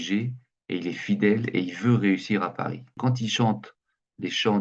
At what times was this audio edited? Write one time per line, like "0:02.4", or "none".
0:02.8